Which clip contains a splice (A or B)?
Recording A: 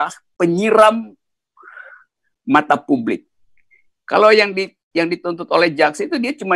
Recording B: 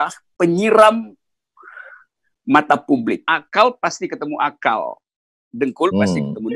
B